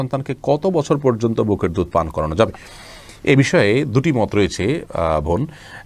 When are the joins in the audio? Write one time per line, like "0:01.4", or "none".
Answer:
none